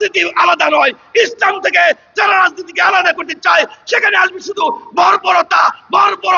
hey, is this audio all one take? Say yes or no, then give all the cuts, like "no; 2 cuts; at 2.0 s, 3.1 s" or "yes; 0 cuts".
yes; 0 cuts